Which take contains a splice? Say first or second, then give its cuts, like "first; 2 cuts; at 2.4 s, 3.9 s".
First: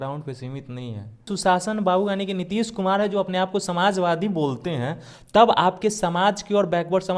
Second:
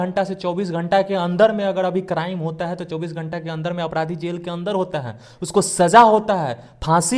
first; 1 cut; at 1.3 s